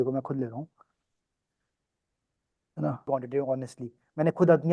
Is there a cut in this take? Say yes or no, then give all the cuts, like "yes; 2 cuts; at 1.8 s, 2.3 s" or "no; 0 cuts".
yes; 1 cut; at 3.1 s